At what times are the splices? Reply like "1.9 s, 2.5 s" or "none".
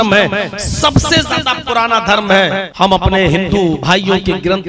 2.7 s, 3.8 s